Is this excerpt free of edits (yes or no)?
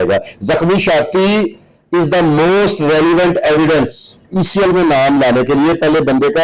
no